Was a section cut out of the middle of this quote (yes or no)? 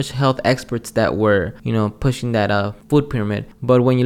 yes